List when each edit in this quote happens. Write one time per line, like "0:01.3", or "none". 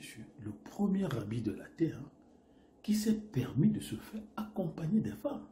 none